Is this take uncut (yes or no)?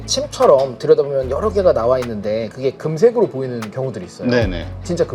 yes